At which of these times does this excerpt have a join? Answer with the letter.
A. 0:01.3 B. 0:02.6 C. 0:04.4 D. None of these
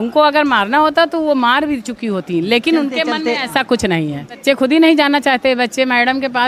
C